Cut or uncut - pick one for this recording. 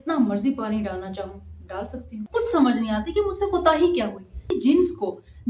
cut